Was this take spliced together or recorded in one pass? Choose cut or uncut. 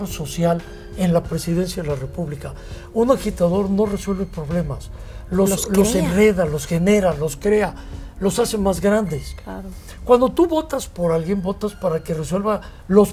uncut